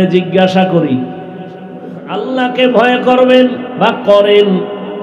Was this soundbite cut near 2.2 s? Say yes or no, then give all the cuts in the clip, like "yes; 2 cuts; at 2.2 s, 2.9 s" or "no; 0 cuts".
yes; 1 cut; at 2.2 s